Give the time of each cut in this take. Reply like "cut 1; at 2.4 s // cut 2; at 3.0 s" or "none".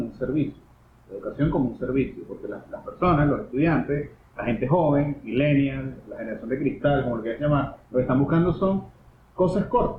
none